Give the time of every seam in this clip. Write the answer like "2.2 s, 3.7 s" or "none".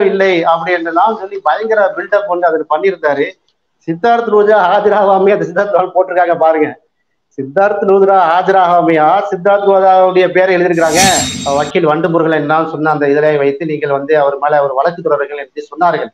11.3 s